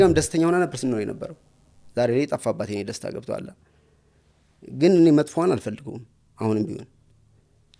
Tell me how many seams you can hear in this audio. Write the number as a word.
zero